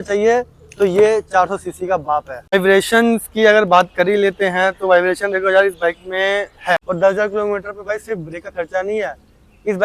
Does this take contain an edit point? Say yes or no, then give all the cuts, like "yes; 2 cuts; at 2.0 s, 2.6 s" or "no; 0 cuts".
yes; 2 cuts; at 2.5 s, 6.8 s